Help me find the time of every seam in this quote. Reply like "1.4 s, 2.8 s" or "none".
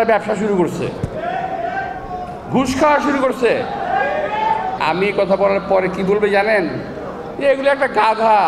4.8 s